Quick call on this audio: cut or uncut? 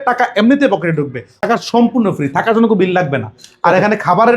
cut